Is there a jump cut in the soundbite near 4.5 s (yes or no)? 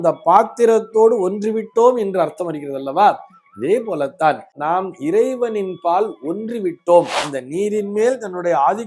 yes